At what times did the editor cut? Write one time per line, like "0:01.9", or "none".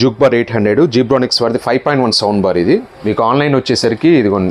0:02.9

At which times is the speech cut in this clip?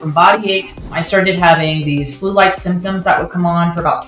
0:01.0

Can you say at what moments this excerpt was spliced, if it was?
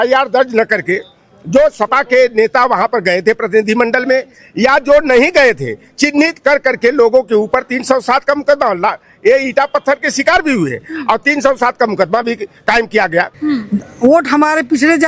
0:13.3

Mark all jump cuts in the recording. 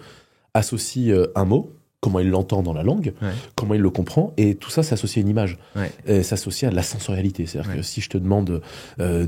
none

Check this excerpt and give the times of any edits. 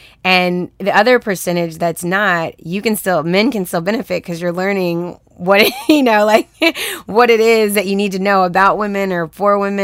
none

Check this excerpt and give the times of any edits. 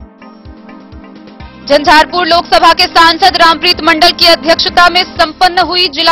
0:01.5

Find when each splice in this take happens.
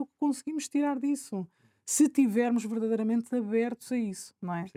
none

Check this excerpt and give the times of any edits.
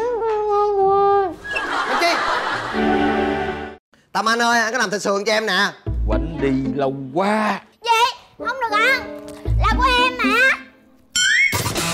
0:02.7

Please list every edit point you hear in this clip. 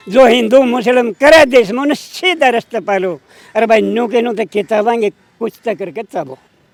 none

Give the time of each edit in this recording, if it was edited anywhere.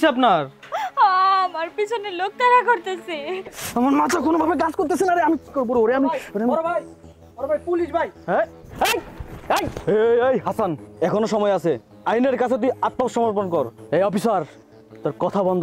0:03.6
0:10.8
0:13.8

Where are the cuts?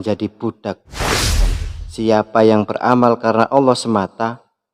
0:01.3

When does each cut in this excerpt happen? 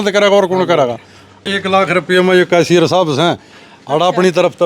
0:01.5

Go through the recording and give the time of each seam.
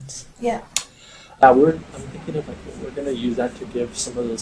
0:01.4

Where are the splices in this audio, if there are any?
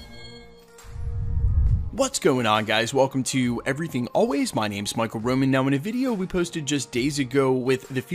0:01.5

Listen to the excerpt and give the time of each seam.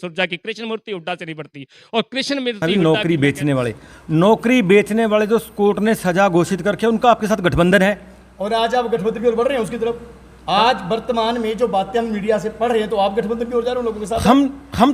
0:02.6

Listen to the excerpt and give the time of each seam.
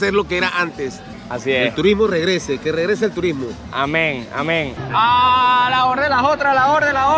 0:01.1
0:04.7

